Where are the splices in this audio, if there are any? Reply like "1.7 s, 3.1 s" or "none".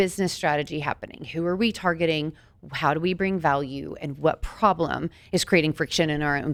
none

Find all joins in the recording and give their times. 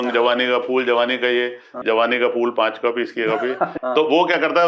1.8 s, 3.8 s

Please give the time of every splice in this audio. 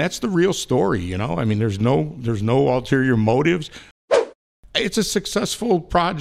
4.0 s

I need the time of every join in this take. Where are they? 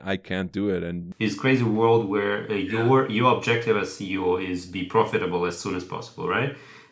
1.1 s

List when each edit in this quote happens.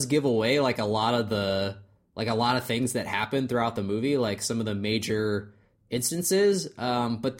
none

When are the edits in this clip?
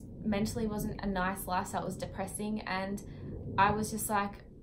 none

